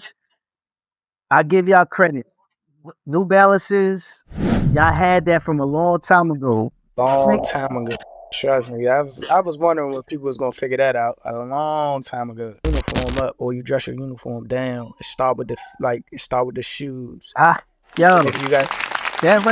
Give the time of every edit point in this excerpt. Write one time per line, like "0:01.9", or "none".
0:12.6